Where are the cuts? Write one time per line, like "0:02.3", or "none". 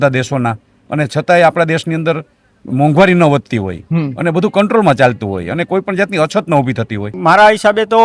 0:07.1